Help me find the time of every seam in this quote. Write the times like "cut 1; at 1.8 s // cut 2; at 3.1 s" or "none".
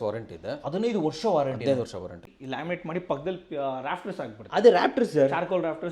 cut 1; at 2.3 s